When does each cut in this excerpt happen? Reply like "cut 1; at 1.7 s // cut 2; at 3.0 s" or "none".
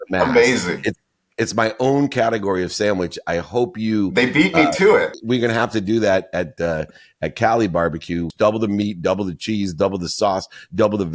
cut 1; at 5.1 s // cut 2; at 8.3 s